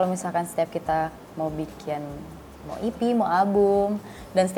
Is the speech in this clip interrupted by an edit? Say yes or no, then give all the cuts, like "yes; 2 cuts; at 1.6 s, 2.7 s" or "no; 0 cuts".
no; 0 cuts